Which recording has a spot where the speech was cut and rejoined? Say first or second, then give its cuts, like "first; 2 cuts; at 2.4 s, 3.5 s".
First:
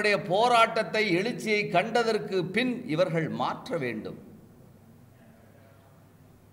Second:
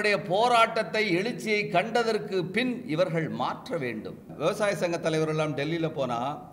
second; 1 cut; at 4.3 s